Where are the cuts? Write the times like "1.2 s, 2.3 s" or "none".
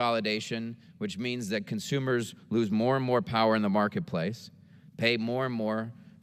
none

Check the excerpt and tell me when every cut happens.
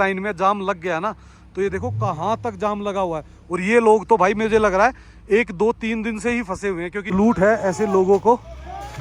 7.0 s

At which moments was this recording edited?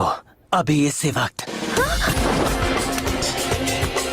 2.2 s

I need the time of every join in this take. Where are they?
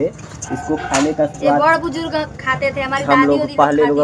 none

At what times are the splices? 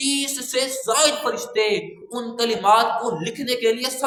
none

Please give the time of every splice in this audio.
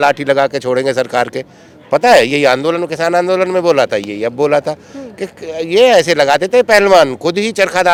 none

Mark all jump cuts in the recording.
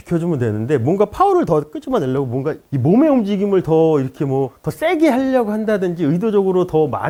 none

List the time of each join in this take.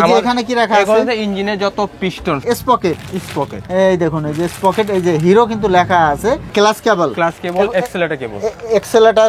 2.4 s, 6.5 s

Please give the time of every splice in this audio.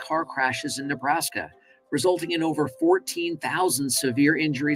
none

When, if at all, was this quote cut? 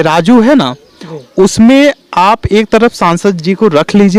none

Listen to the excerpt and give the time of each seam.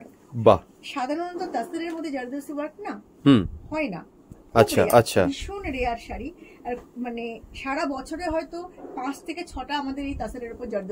none

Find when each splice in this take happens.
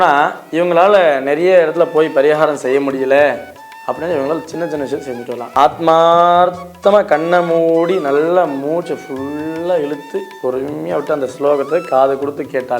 5.4 s

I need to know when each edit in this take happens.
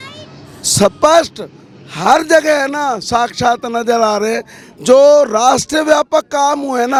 none

